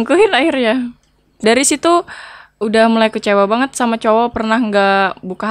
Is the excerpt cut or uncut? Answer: cut